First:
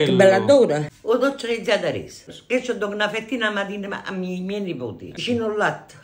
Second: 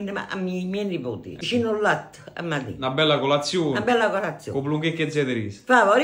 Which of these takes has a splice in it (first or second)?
first